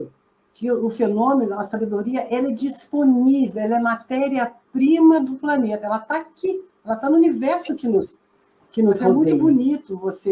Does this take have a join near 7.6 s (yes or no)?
no